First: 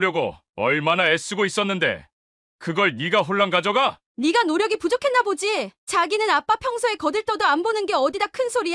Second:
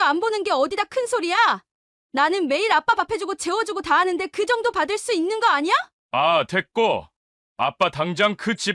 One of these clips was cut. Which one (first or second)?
second